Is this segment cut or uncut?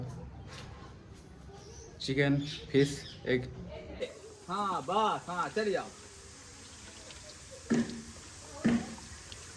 cut